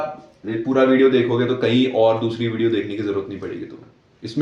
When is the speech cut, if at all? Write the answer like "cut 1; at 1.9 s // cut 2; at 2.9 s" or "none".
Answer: none